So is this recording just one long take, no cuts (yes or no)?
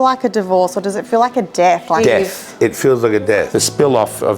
no